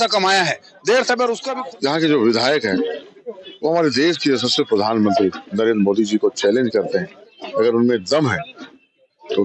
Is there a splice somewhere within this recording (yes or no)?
yes